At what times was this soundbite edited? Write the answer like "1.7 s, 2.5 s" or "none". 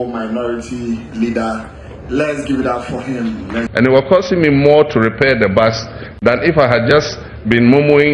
3.7 s